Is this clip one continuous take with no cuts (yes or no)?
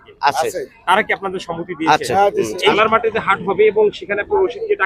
no